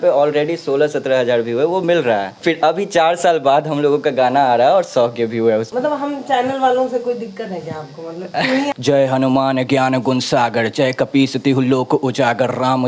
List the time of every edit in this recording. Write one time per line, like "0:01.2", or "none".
0:02.3
0:05.7
0:08.7